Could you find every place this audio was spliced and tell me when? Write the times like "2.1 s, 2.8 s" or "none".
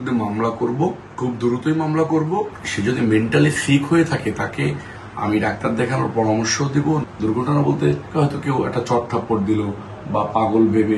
1.1 s, 2.6 s, 7.1 s, 8.0 s